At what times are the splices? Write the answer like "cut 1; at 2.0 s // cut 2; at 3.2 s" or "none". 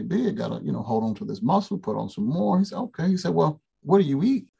cut 1; at 3.7 s